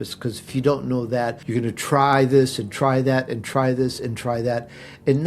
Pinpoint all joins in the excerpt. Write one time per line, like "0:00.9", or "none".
0:01.4